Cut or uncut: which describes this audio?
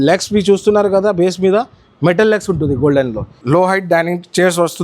cut